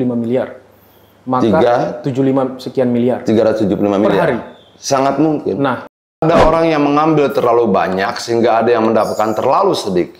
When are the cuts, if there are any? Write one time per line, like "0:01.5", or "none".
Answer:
0:06.2